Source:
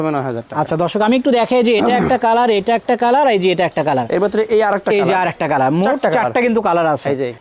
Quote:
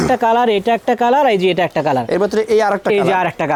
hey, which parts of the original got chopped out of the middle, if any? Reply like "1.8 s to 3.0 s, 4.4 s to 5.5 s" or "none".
none

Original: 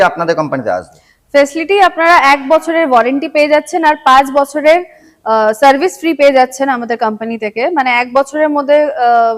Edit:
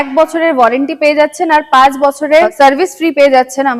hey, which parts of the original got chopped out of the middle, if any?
4.8 s to 5.5 s

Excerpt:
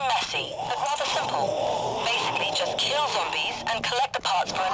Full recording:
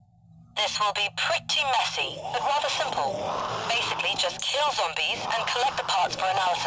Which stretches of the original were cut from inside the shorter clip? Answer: none

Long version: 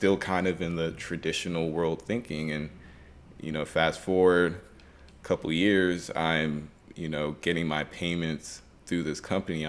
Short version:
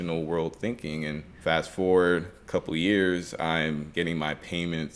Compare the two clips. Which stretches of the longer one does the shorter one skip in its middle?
2.8 s to 3.7 s, 4.6 s to 5.1 s, 6.7 s to 7.4 s

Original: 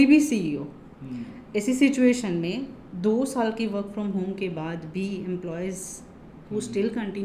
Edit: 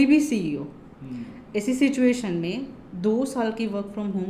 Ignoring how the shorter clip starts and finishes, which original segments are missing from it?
none

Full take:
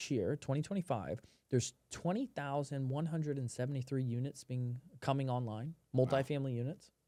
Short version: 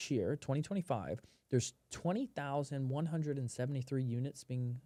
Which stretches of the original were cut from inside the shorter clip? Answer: none

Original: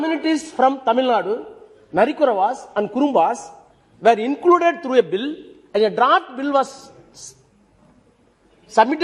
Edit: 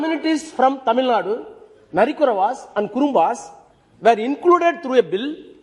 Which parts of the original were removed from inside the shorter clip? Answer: none

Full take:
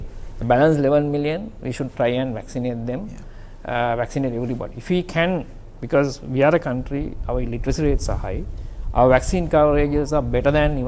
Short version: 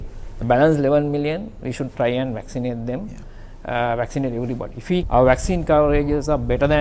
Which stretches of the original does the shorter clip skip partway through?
5.1 s to 8.9 s

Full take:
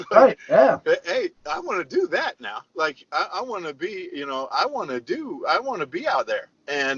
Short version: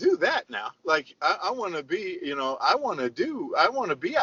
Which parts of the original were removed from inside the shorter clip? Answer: none

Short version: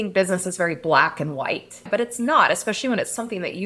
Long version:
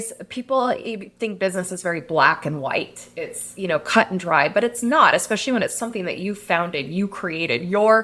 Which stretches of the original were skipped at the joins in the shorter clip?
3.1 s to 4.5 s

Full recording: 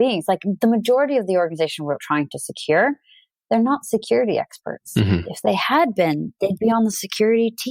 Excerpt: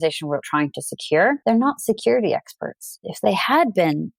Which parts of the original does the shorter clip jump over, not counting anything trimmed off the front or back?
3.0 s to 3.4 s, 5.0 s to 5.1 s

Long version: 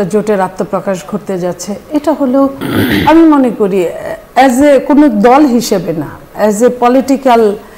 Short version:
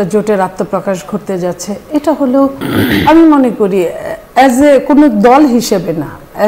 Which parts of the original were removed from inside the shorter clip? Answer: none

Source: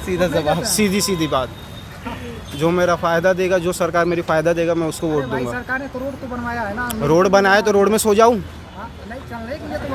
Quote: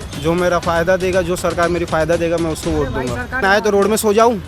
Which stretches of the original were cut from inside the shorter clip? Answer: 5.8 s to 7.4 s

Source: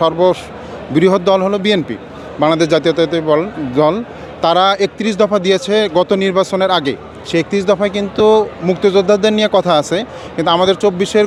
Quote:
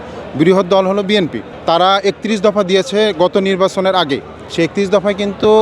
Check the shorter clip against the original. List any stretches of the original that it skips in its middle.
2.0 s to 4.2 s

